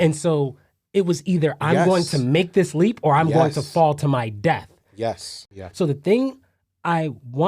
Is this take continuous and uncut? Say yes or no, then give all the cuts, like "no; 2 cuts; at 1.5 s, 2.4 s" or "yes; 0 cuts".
no; 1 cut; at 5.3 s